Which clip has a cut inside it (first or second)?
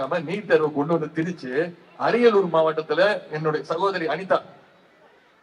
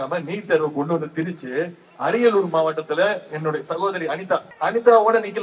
second